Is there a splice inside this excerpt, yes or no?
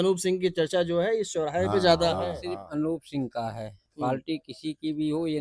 yes